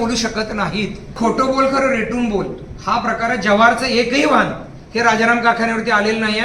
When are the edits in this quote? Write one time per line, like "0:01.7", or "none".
0:01.1